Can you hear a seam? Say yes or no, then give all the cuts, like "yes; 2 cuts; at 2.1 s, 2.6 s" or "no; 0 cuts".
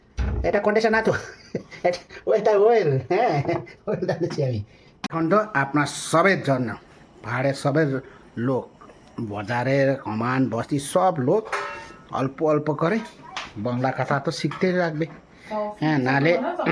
yes; 1 cut; at 5.1 s